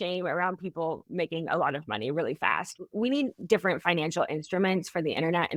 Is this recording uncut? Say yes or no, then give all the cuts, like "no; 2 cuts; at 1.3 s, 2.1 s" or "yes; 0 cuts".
yes; 0 cuts